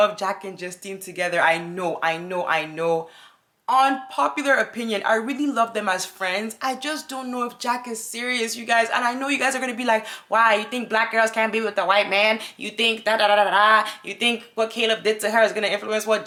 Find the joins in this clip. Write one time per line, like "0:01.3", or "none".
none